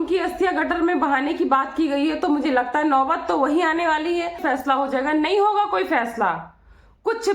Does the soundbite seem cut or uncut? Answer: cut